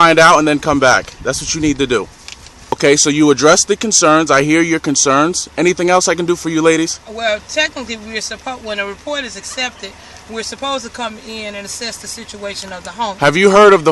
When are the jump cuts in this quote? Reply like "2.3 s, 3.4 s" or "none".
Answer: 2.7 s